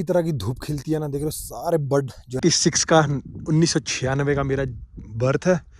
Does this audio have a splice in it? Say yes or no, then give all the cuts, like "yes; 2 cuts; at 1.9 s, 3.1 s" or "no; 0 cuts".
yes; 1 cut; at 2.4 s